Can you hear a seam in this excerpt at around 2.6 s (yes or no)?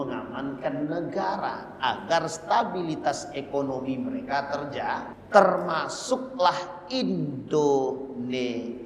no